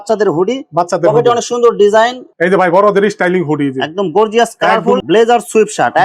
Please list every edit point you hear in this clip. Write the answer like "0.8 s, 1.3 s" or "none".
2.3 s, 5.0 s